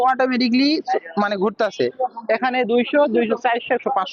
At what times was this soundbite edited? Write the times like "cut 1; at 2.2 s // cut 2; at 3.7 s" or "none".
cut 1; at 1.9 s